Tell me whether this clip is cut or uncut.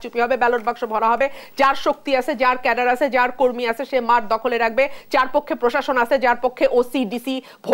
uncut